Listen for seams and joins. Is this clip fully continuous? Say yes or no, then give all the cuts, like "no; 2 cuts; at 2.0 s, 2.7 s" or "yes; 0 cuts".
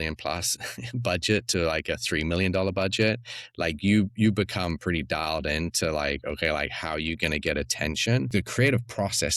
no; 1 cut; at 8.3 s